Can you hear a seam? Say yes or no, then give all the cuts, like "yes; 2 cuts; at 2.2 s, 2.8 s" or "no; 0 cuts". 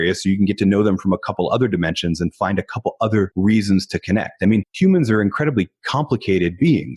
yes; 2 cuts; at 3.3 s, 4.7 s